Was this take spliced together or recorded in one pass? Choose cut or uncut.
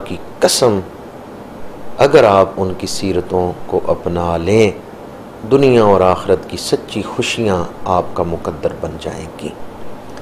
uncut